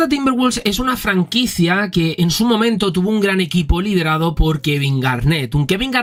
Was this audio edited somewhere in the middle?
no; 0 cuts

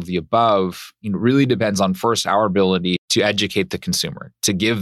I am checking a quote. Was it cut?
yes; 1 cut; at 3.0 s

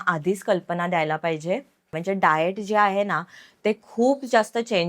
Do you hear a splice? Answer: yes; 1 cut; at 1.9 s

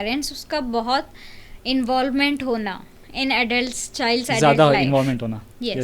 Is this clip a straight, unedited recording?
yes; 0 cuts

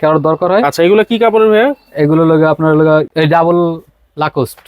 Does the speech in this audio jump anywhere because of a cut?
yes; 1 cut; at 3.1 s

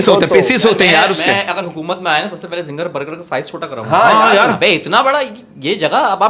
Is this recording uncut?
yes; 0 cuts

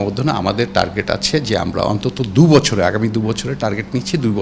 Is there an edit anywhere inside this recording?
no; 0 cuts

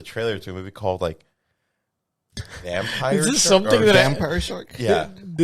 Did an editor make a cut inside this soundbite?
no; 0 cuts

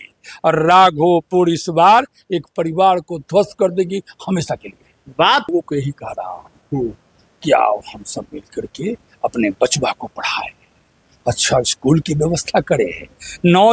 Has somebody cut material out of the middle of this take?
yes; 1 cut; at 5.5 s

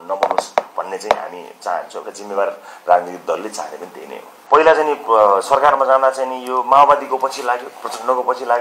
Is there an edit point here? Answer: yes; 1 cut; at 4.3 s

